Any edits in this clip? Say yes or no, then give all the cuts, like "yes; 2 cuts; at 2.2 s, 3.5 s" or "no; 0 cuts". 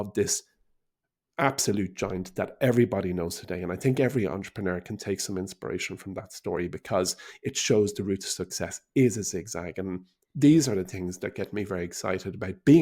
no; 0 cuts